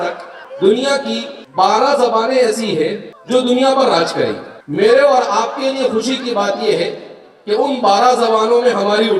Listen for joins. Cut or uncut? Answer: uncut